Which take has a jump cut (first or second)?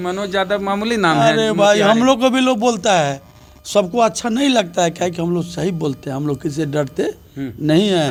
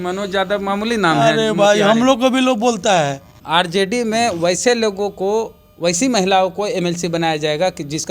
second